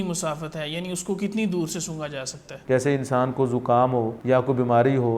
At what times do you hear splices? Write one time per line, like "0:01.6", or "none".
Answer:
0:02.5
0:04.2